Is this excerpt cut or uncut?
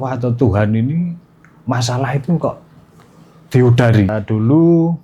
cut